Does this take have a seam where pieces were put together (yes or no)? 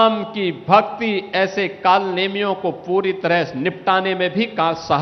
no